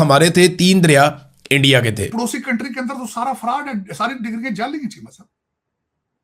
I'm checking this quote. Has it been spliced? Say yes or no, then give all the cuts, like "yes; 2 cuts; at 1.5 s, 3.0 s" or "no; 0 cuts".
yes; 1 cut; at 2.1 s